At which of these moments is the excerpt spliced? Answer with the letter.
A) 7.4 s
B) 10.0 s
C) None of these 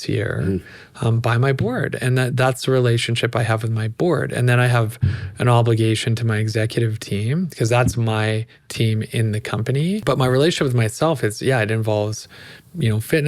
B